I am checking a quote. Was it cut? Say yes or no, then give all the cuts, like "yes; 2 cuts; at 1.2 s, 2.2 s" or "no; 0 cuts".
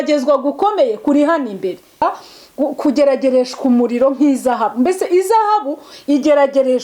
yes; 1 cut; at 2.0 s